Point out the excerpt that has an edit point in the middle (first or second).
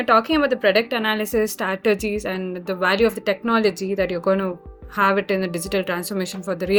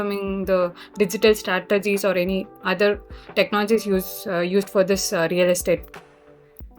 second